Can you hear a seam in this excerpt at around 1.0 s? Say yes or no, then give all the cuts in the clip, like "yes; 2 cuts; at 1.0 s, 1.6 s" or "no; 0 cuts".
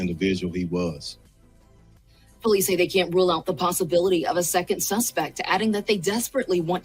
yes; 2 cuts; at 1.0 s, 2.5 s